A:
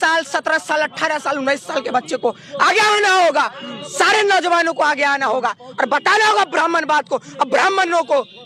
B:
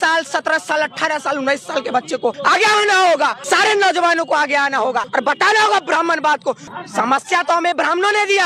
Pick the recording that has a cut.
B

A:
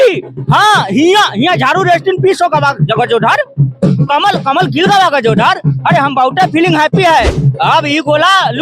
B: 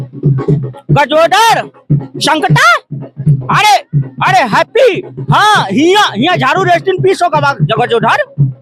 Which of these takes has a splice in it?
A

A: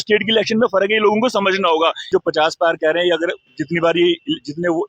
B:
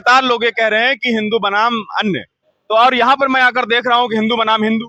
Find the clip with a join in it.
A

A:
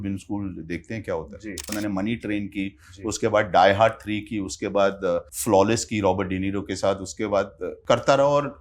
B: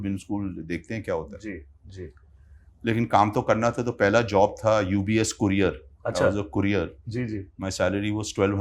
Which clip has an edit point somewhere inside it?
A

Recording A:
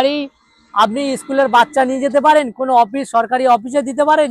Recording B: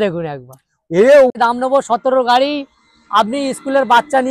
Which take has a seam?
B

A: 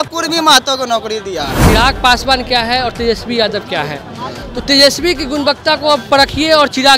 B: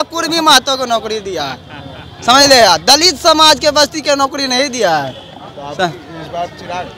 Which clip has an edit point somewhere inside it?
A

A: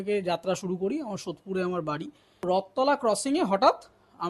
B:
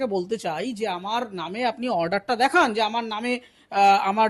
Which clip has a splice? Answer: A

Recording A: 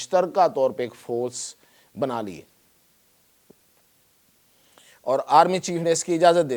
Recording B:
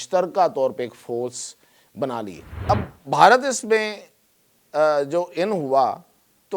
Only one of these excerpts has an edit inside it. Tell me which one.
B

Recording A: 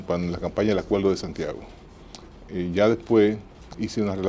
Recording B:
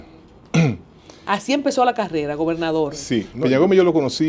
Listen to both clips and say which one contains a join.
B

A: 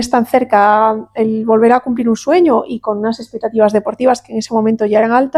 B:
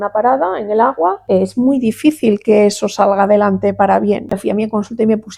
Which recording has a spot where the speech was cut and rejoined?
B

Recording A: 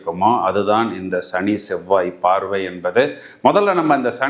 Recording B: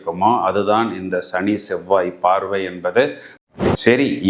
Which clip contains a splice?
B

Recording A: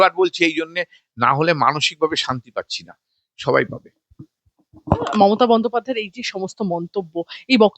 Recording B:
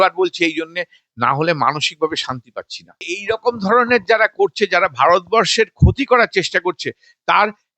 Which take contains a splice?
B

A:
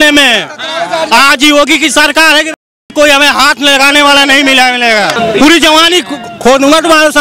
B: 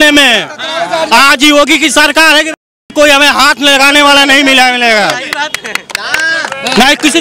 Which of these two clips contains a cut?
A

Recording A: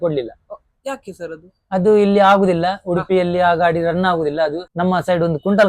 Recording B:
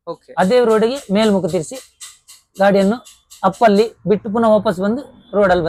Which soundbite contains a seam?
A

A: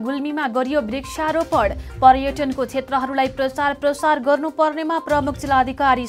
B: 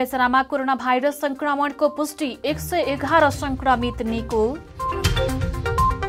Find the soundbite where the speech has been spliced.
B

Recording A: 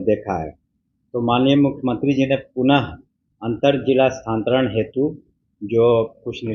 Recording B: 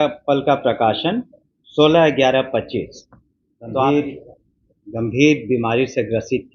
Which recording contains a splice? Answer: B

